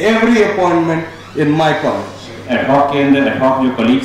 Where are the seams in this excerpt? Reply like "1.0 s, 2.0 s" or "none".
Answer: 2.4 s